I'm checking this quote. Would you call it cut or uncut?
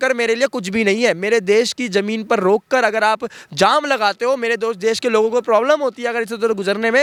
uncut